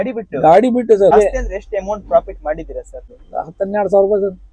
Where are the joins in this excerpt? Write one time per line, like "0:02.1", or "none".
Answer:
0:01.1
0:03.3